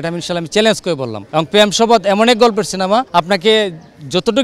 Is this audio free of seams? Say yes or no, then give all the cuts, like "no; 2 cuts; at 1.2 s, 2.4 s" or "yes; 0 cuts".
no; 2 cuts; at 1.2 s, 3.1 s